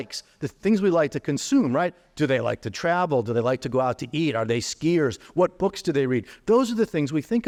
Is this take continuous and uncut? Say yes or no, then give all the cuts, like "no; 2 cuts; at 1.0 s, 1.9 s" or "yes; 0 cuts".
yes; 0 cuts